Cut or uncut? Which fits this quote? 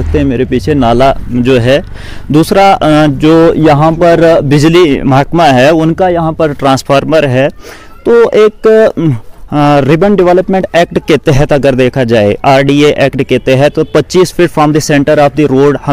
uncut